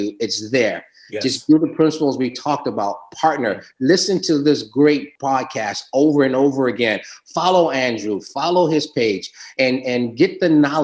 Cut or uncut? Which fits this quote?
cut